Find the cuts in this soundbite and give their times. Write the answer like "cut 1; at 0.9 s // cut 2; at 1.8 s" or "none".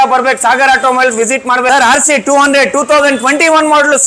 cut 1; at 1.7 s